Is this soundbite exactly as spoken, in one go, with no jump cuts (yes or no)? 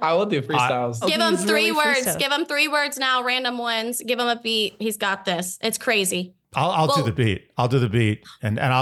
no